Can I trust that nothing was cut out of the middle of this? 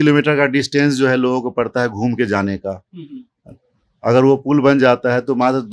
yes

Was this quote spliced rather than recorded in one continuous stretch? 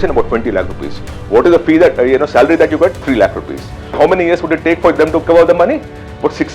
yes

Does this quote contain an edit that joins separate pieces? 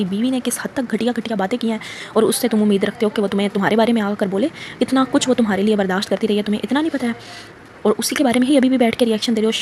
no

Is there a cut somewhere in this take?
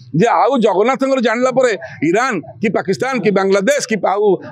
no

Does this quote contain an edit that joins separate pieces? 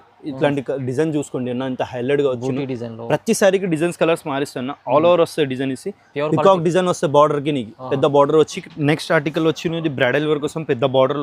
yes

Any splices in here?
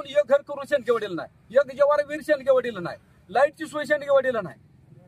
no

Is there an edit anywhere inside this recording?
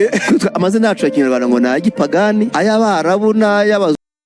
no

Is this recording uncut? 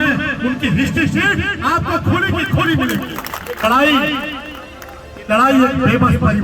no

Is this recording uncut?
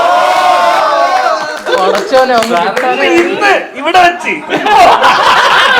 yes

